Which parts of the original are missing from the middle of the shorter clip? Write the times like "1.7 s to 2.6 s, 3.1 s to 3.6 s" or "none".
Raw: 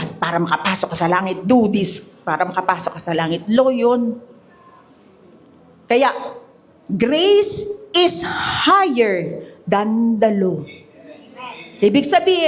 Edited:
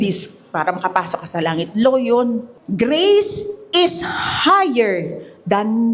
4.3 s to 6.8 s